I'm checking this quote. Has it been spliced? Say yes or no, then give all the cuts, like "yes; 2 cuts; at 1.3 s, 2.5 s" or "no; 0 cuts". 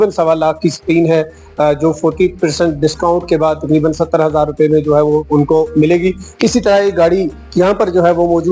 no; 0 cuts